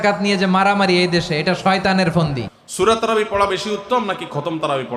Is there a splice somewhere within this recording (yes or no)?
yes